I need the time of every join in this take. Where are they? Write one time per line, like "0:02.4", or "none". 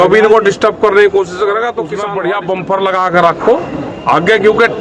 0:01.9